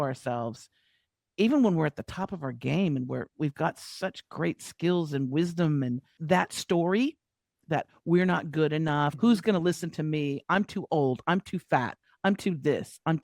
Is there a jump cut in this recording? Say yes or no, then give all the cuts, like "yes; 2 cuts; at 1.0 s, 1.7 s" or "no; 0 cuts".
yes; 1 cut; at 6.1 s